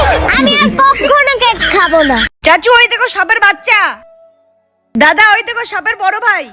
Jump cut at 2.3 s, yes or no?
yes